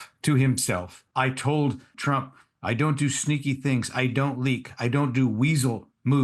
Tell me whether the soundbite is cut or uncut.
cut